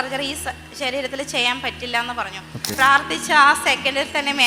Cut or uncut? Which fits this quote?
cut